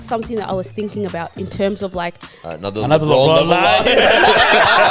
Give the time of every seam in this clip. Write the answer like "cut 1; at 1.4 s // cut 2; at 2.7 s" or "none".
none